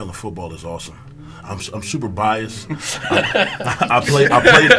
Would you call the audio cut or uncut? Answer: uncut